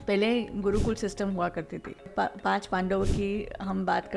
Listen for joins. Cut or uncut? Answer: cut